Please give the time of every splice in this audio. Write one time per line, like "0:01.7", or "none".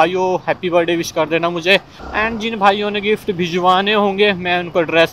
none